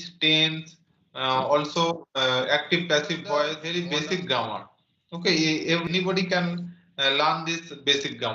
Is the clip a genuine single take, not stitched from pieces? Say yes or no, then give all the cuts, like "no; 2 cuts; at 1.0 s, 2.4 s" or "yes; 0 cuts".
no; 2 cuts; at 3.6 s, 5.8 s